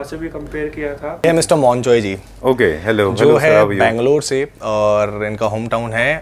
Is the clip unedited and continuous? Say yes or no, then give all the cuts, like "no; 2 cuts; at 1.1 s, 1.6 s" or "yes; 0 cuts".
no; 1 cut; at 1.2 s